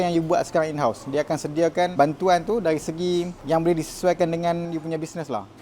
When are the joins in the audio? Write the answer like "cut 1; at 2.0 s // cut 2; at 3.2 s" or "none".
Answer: cut 1; at 1.9 s // cut 2; at 3.4 s // cut 3; at 4.7 s